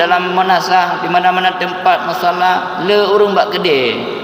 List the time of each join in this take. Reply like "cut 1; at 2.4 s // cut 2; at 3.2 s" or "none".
none